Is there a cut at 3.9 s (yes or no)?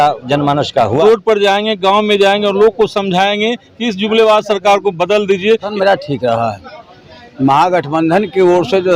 no